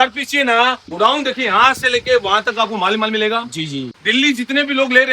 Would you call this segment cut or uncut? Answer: cut